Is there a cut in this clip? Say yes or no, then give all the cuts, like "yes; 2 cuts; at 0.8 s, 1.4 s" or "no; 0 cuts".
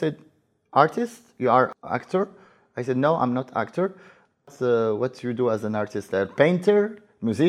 yes; 2 cuts; at 1.7 s, 4.5 s